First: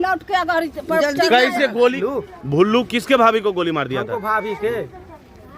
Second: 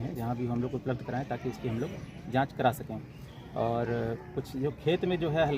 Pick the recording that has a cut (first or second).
first